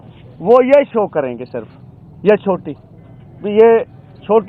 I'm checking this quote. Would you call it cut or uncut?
uncut